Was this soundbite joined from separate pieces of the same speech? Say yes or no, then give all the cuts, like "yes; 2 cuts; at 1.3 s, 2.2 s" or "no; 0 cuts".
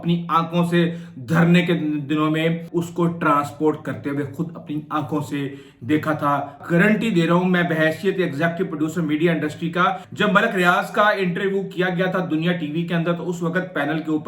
yes; 3 cuts; at 2.6 s, 6.6 s, 10.1 s